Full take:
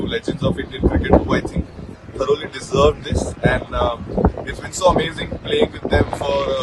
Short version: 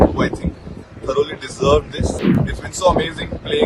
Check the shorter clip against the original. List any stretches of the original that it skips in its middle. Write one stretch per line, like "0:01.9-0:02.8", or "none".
0:03.4-0:04.3